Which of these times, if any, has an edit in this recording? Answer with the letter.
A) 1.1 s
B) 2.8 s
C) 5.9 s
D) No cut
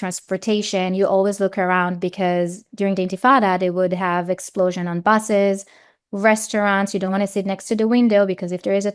D